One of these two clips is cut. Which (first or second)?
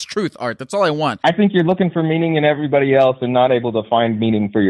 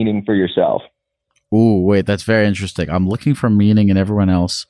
first